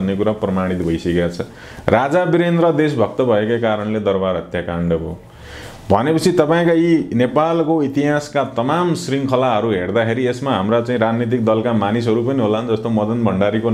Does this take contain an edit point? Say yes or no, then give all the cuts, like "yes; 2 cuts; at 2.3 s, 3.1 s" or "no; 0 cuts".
no; 0 cuts